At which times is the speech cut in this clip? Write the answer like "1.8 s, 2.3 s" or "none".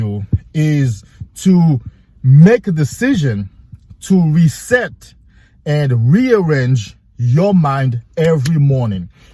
none